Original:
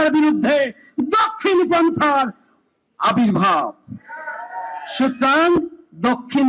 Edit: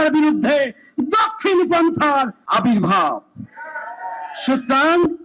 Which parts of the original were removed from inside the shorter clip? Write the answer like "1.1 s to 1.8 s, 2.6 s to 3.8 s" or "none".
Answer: 2.4 s to 2.9 s